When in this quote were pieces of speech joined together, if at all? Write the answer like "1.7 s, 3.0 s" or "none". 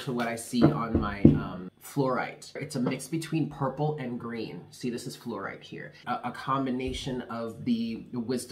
1.7 s, 2.7 s, 6.0 s